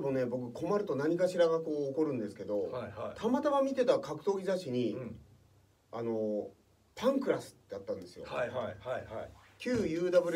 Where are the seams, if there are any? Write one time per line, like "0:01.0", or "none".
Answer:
none